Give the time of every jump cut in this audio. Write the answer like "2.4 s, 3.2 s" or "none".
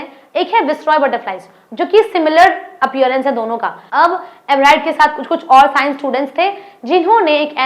3.8 s